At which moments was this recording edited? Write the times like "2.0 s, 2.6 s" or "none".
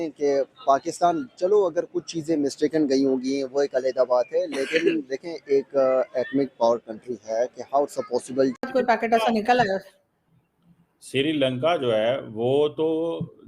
8.5 s